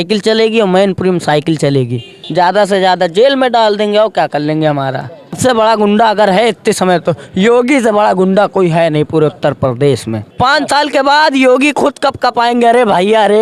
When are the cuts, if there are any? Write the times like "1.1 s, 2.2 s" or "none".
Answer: 2.1 s, 5.4 s, 10.2 s